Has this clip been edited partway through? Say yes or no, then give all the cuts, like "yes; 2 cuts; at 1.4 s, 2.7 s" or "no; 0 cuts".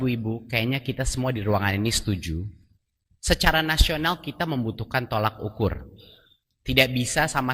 no; 0 cuts